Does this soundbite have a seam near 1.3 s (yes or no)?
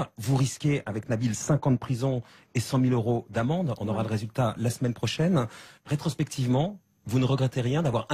yes